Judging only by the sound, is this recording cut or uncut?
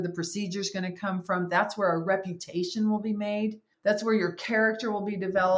cut